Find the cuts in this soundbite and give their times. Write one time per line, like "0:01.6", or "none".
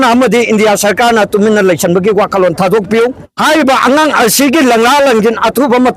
0:03.3